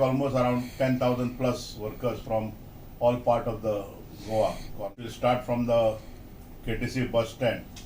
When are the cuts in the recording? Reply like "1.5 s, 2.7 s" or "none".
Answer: 4.7 s